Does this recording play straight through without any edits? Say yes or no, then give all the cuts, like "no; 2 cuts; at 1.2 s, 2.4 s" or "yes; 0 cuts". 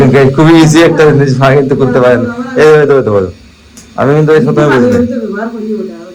yes; 0 cuts